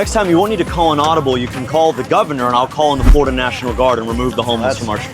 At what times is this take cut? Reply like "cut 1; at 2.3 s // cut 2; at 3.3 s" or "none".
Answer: none